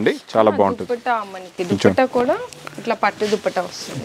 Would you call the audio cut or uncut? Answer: uncut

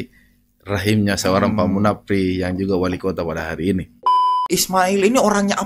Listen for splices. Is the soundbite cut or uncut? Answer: cut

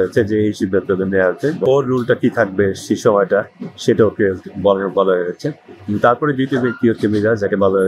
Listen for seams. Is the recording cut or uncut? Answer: cut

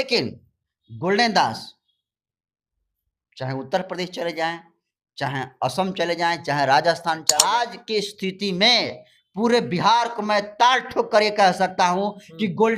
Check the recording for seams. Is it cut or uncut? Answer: cut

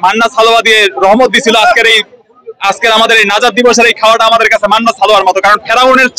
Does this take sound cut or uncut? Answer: uncut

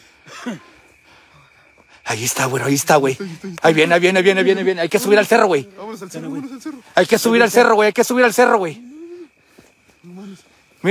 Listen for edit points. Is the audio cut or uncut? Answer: uncut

